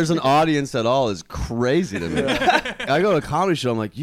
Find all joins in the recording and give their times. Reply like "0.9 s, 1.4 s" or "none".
2.8 s